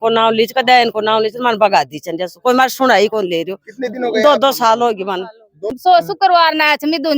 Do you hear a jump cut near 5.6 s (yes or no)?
yes